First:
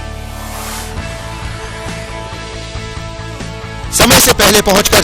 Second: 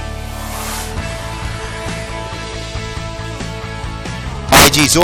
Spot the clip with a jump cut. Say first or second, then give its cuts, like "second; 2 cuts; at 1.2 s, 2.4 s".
second; 1 cut; at 3.4 s